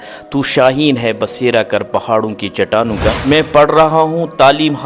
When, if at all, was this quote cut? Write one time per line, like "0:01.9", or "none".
0:03.2